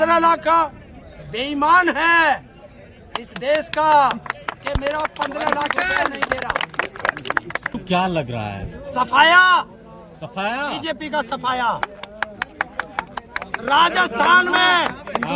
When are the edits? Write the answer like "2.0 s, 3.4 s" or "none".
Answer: none